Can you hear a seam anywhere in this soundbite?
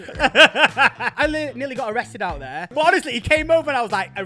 yes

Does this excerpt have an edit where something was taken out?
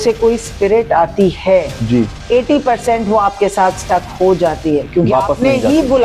no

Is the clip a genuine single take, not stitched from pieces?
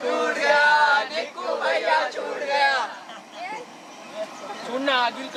yes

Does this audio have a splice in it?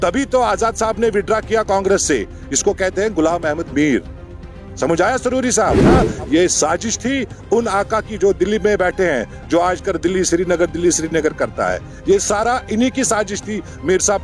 yes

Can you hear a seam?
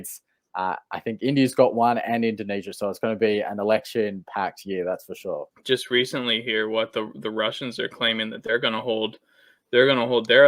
yes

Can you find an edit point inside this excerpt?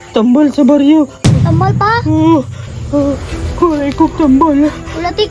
yes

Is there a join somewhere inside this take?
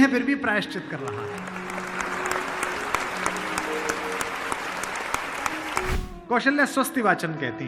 yes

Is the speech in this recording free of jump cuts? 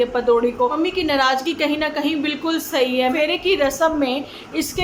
no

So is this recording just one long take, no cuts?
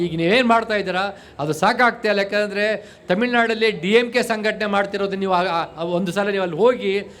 yes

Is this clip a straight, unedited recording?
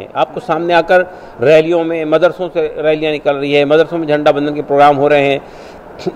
yes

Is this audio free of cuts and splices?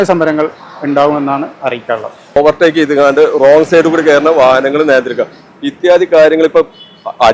no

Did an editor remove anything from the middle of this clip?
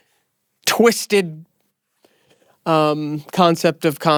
no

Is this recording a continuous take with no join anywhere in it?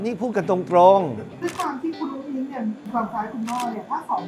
no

